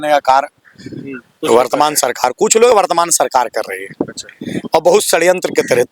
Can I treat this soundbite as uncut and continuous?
yes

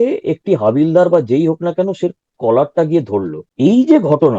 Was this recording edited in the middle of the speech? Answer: no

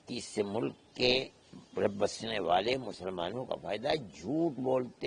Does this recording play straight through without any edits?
yes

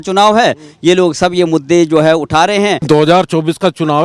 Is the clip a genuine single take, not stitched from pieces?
no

